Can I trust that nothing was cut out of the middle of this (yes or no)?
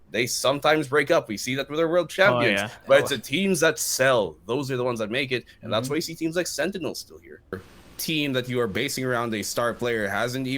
no